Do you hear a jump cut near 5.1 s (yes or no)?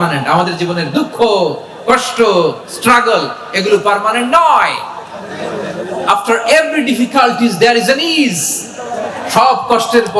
no